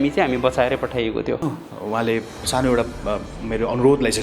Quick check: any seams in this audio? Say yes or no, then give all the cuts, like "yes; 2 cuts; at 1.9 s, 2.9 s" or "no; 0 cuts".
yes; 1 cut; at 1.4 s